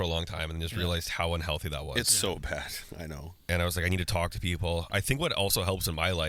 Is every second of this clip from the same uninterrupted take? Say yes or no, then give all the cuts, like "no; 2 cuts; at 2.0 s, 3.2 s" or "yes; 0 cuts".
yes; 0 cuts